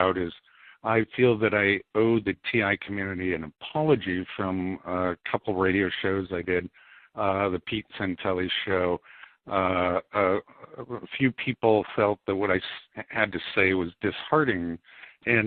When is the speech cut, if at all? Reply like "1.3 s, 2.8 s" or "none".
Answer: none